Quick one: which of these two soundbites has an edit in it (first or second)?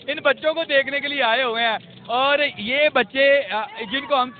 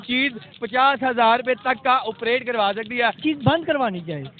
second